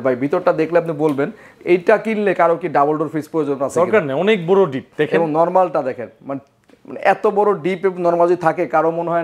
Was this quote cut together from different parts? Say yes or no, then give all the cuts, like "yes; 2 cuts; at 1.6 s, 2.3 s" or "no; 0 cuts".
no; 0 cuts